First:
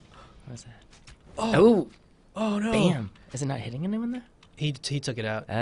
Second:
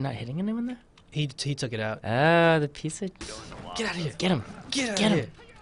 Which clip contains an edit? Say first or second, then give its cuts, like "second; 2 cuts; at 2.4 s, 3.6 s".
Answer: second; 1 cut; at 3.4 s